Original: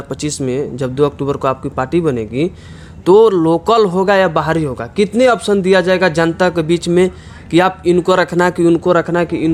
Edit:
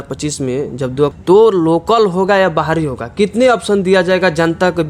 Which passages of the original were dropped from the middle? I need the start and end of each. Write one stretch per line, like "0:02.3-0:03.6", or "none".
0:01.2-0:03.0

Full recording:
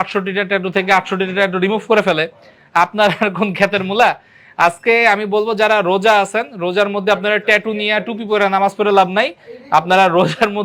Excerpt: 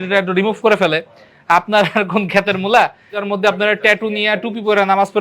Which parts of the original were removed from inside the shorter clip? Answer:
0:04.5-0:06.8

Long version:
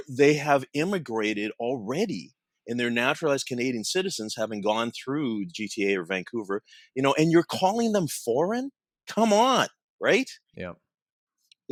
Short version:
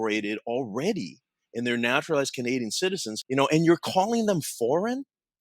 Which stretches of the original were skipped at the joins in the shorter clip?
0:04.3-0:06.8

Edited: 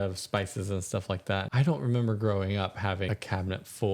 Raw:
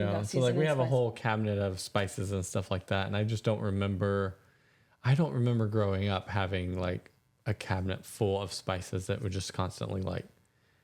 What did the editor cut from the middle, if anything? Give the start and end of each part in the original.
0:03.1-0:05.0
0:06.6-0:07.5

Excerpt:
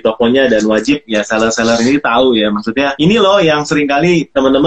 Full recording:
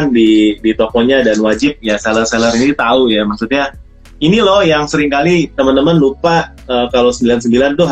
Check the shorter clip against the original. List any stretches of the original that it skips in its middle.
0:03.7-0:04.2

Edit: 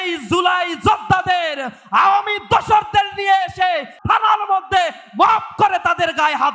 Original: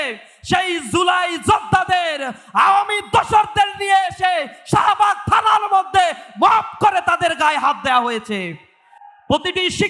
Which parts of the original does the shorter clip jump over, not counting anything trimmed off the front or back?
0:04.6-0:05.2

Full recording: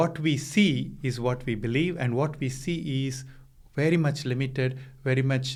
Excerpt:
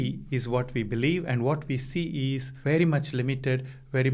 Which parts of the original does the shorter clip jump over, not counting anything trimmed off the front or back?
0:03.2-0:03.6

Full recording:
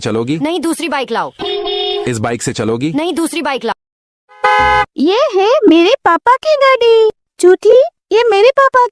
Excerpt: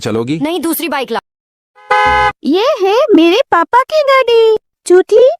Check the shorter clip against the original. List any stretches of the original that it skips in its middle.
0:01.2-0:03.7

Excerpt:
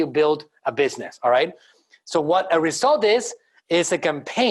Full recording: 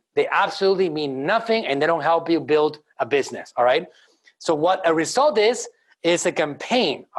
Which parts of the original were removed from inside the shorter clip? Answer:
none

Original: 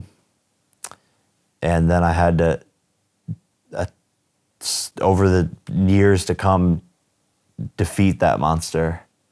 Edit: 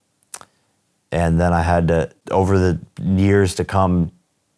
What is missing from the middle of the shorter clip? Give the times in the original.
0:02.7-0:04.9

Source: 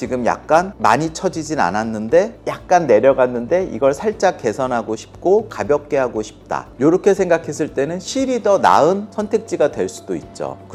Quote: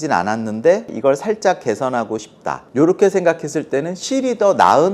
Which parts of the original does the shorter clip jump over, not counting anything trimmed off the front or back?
0:02.4-0:03.7
0:05.0-0:06.3

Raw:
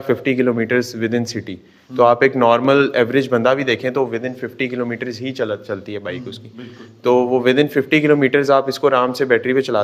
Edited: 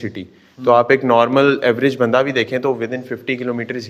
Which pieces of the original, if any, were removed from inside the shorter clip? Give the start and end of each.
none

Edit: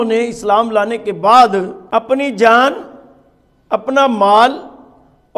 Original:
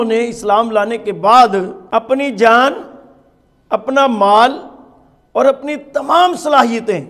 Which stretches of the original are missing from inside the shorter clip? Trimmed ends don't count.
none

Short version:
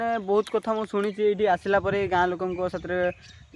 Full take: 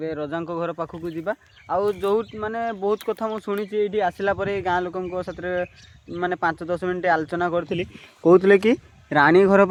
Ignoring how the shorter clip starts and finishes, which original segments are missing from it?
none

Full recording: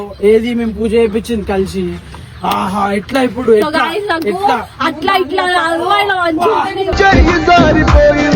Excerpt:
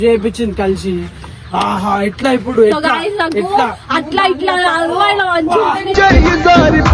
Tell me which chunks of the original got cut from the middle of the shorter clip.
0:06.8-0:07.0

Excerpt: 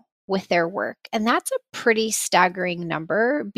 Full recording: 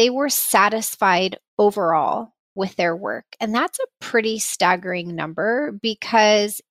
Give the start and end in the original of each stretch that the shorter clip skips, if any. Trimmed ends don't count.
none

